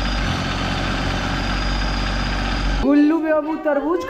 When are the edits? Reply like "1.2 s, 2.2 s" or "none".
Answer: 2.8 s